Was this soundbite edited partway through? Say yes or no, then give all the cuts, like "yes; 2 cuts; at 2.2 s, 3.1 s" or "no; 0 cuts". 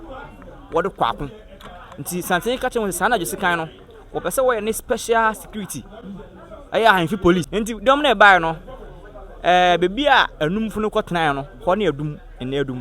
yes; 1 cut; at 7.5 s